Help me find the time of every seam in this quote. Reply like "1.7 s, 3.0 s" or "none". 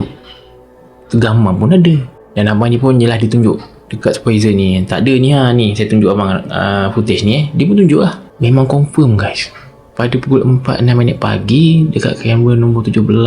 8.3 s